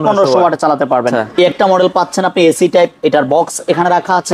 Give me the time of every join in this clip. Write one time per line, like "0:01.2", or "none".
0:01.3